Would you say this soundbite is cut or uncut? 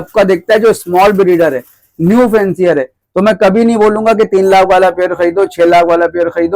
uncut